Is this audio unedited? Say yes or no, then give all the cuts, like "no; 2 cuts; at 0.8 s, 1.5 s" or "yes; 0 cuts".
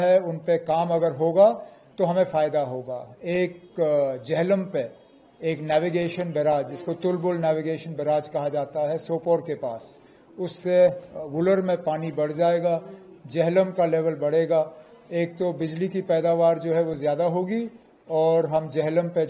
yes; 0 cuts